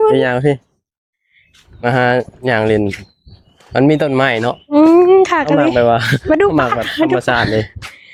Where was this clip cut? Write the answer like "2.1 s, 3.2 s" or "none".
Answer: none